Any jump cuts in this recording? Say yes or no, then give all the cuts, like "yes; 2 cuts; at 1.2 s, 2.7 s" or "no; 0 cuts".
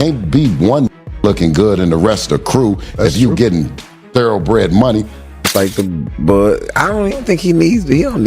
yes; 1 cut; at 5.3 s